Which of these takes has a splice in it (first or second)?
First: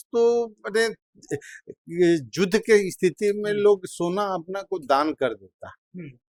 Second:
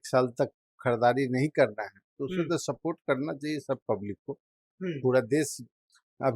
second